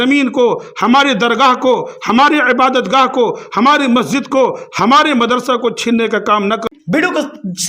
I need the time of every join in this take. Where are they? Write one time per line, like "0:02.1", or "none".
0:06.6